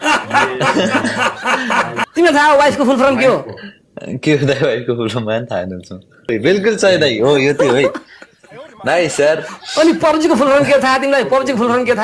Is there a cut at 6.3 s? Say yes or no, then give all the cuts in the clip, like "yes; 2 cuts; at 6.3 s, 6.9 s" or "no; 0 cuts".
yes; 2 cuts; at 2.0 s, 6.3 s